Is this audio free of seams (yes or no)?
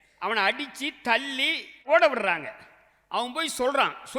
no